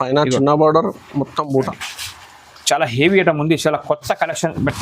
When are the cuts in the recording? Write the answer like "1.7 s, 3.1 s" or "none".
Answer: 1.8 s